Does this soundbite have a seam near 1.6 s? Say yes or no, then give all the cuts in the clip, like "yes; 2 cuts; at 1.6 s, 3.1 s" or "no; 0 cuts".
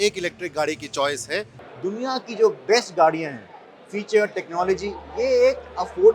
yes; 1 cut; at 1.6 s